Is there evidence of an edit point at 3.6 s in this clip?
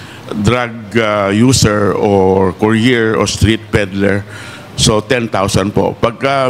no; 0 cuts

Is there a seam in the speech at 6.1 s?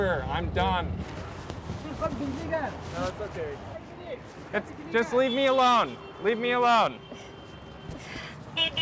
no; 2 cuts; at 1.0 s, 3.9 s

